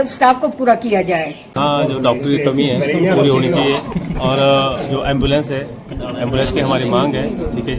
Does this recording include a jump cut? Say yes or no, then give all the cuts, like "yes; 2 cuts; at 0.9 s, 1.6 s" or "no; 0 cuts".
yes; 1 cut; at 1.4 s